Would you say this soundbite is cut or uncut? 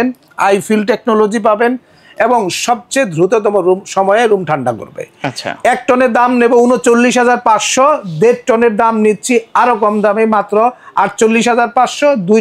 uncut